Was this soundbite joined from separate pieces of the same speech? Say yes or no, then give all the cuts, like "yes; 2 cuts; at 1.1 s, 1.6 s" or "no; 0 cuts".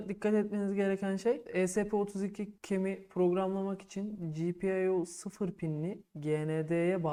no; 0 cuts